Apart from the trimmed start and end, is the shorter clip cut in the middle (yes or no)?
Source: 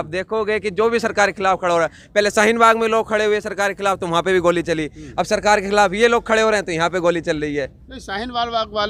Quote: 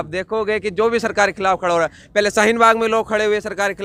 no